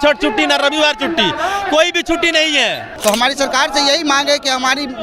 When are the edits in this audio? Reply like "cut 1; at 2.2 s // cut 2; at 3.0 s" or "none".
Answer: cut 1; at 2.9 s